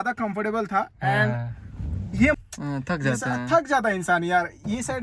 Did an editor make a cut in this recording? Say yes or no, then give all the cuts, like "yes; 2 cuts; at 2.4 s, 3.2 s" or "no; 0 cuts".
yes; 1 cut; at 2.4 s